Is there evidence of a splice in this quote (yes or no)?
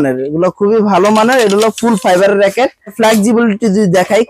yes